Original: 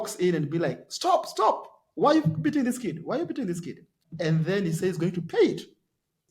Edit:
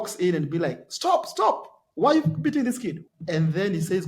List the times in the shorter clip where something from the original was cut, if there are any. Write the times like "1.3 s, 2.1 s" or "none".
3.0 s